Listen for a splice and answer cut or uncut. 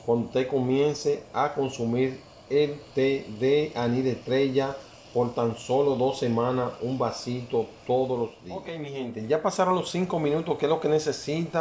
cut